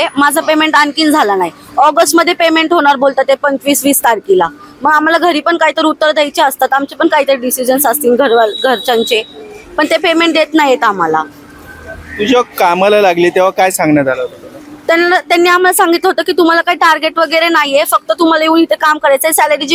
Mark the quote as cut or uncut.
uncut